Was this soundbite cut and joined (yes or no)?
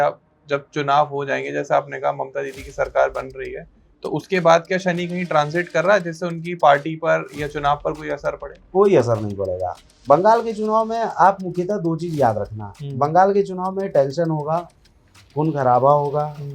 no